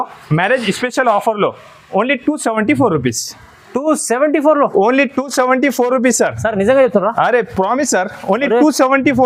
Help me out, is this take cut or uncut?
uncut